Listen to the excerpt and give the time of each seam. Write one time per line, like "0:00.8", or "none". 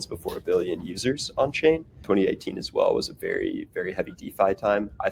0:02.0